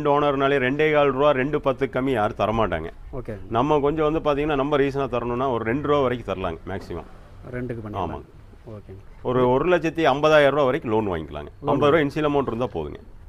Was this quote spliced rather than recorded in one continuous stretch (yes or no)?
no